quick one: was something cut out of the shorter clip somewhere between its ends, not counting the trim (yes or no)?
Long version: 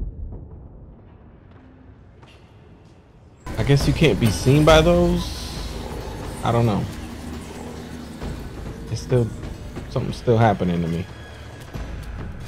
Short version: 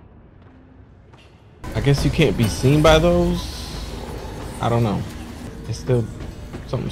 yes